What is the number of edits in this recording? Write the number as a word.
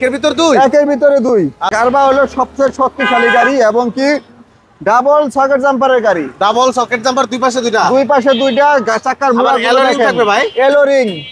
one